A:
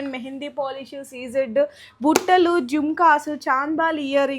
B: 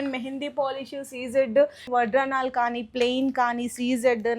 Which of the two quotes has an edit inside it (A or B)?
B